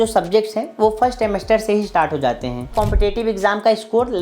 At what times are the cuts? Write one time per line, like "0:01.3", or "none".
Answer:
0:02.7